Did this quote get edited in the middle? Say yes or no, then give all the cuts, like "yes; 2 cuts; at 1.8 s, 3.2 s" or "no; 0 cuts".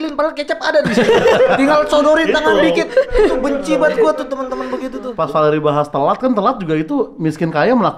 yes; 1 cut; at 5.1 s